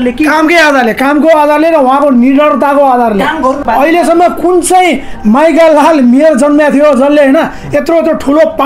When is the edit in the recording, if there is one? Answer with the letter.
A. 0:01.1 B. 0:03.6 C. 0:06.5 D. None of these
B